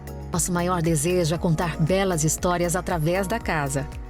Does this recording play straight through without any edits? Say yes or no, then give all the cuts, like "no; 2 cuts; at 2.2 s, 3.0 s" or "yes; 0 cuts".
yes; 0 cuts